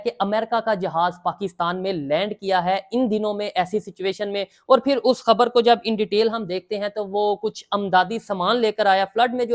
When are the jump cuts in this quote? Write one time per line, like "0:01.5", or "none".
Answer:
none